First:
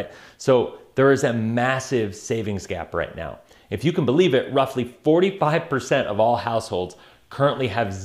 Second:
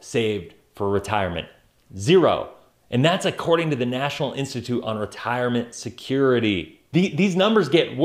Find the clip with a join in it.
second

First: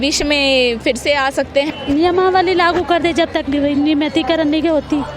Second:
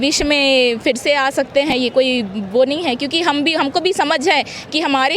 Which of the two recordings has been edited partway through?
first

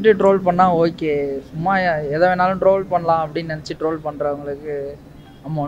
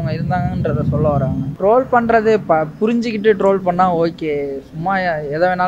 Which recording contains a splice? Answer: second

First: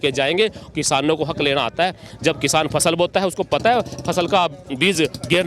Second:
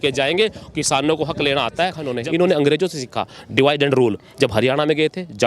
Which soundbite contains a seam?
second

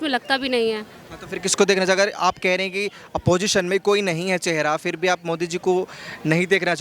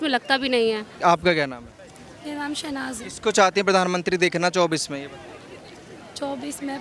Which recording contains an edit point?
second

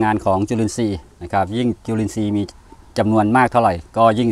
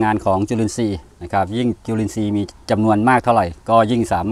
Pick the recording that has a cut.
second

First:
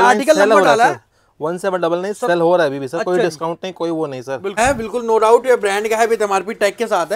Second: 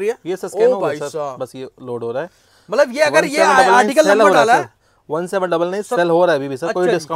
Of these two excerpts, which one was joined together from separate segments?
first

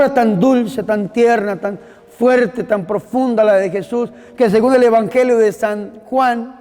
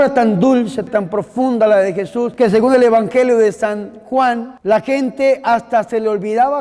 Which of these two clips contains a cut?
second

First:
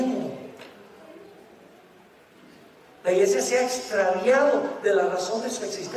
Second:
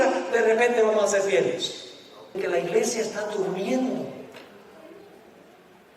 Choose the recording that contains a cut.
second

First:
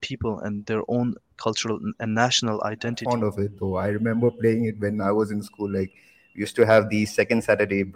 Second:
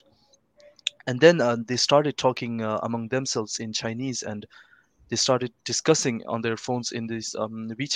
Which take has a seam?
first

